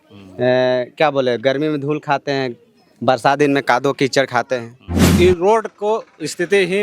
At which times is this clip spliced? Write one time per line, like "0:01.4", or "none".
0:05.1